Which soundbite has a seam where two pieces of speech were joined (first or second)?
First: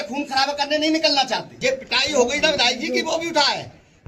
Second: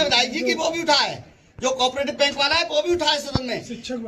first